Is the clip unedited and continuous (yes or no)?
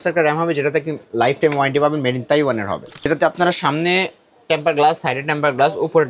no